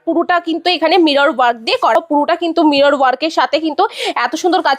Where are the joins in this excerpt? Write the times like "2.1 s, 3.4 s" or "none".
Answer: 2.0 s